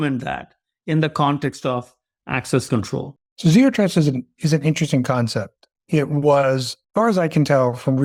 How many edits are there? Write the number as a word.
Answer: zero